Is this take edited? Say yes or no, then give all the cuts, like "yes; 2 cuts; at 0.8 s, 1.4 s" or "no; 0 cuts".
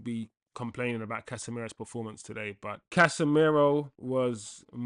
yes; 2 cuts; at 2.8 s, 4.0 s